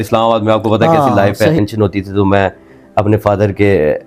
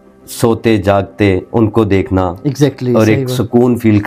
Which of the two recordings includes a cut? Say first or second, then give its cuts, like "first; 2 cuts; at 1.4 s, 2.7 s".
first; 1 cut; at 1.6 s